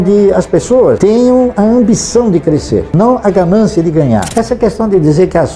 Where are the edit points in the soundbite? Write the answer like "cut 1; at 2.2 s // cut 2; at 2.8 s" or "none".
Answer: cut 1; at 1.0 s // cut 2; at 2.9 s // cut 3; at 4.3 s